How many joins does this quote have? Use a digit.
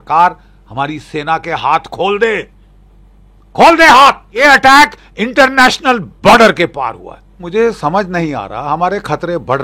2